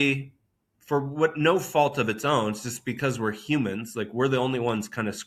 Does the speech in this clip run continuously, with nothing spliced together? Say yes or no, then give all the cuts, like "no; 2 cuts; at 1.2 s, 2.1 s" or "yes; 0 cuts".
yes; 0 cuts